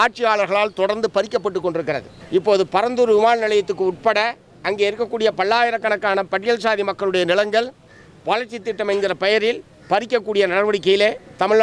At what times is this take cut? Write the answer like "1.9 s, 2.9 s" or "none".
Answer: 2.1 s